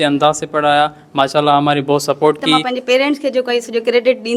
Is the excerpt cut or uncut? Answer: cut